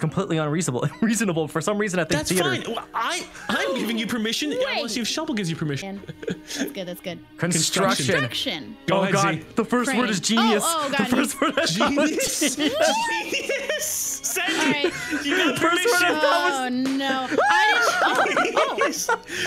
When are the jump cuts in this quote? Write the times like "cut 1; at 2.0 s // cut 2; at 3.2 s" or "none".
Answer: cut 1; at 5.8 s